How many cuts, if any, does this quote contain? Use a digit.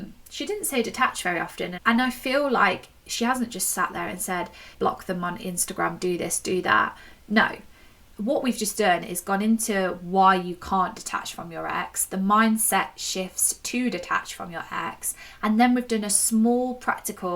1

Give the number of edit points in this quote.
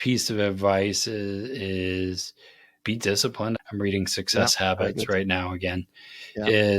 1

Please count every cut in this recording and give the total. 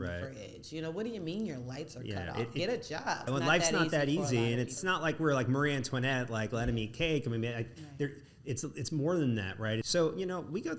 3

